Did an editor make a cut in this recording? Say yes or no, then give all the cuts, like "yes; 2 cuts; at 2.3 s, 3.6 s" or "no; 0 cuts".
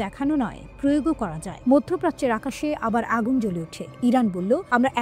no; 0 cuts